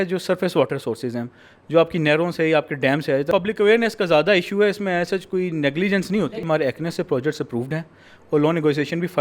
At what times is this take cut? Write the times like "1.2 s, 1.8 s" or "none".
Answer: 3.3 s, 6.4 s